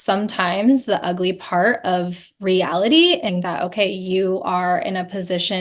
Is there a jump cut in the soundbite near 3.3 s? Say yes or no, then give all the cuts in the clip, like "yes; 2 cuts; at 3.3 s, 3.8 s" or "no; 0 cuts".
yes; 1 cut; at 3.3 s